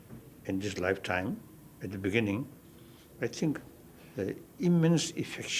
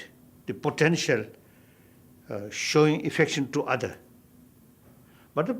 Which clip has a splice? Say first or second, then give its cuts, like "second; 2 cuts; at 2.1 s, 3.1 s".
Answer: second; 1 cut; at 3.5 s